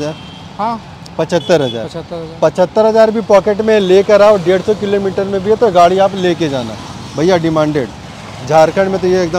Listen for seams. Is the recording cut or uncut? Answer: uncut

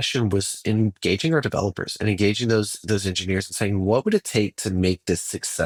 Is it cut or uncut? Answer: uncut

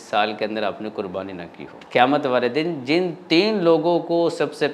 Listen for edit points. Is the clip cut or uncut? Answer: cut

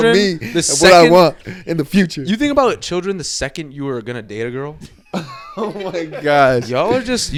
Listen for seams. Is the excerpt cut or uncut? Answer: uncut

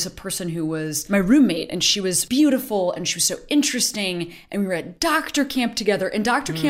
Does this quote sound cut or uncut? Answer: cut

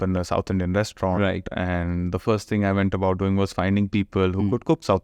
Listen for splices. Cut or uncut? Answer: uncut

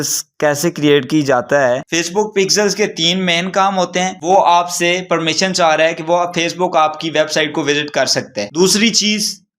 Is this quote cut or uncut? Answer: cut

